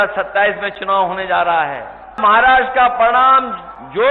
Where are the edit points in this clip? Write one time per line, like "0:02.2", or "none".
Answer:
0:02.2